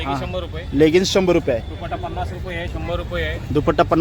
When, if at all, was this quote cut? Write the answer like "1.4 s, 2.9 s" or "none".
none